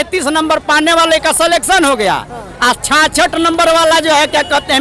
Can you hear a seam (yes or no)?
no